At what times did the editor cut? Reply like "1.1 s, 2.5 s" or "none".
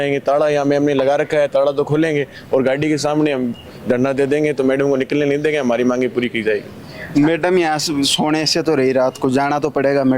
none